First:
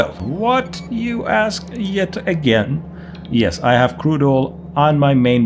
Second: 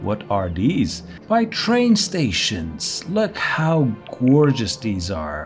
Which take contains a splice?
second; 1 cut; at 1.2 s

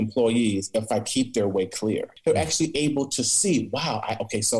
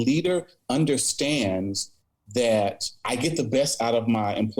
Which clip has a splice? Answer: first; 1 cut; at 2.1 s

